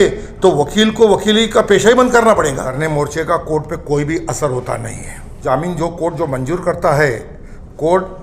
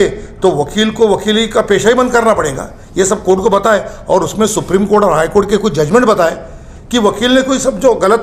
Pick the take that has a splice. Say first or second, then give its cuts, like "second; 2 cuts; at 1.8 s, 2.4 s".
first; 2 cuts; at 2.7 s, 5.4 s